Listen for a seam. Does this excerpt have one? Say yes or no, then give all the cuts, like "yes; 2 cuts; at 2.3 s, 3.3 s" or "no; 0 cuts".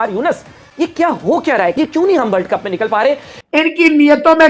yes; 2 cuts; at 1.8 s, 3.3 s